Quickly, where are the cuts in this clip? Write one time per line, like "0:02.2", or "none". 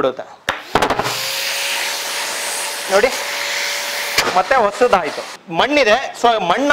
0:05.4